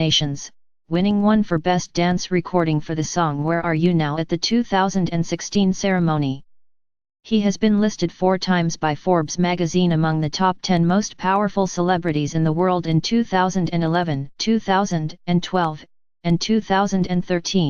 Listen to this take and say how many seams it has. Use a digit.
1